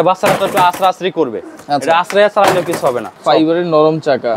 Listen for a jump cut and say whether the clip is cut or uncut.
cut